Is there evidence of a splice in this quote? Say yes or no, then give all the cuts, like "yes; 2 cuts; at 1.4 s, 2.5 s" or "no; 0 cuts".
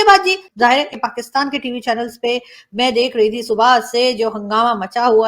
yes; 1 cut; at 0.9 s